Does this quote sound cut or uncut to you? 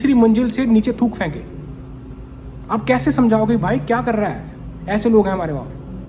uncut